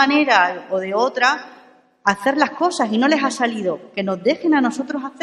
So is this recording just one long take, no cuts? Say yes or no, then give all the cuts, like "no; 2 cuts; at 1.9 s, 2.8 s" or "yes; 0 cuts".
yes; 0 cuts